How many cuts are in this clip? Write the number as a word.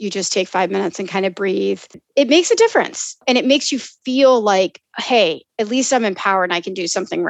two